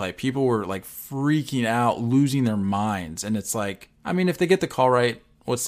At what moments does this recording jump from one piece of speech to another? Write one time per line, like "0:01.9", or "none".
0:03.9